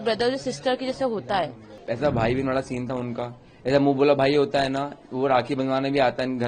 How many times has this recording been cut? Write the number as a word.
one